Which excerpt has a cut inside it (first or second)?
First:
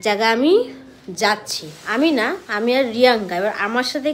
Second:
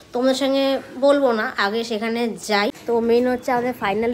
second